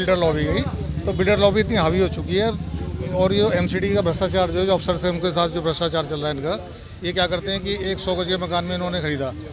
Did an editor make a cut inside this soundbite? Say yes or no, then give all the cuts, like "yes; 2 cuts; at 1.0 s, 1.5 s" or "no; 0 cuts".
no; 0 cuts